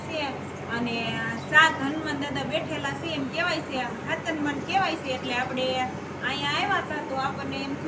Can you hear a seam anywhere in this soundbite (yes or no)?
no